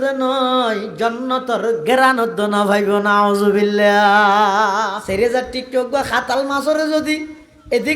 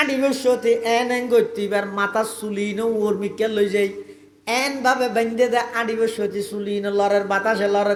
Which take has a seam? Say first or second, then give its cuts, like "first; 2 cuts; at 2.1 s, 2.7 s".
first; 1 cut; at 5.0 s